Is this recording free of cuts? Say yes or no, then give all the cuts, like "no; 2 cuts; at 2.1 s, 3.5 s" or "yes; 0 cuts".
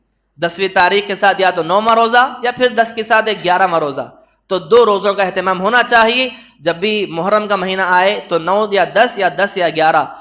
yes; 0 cuts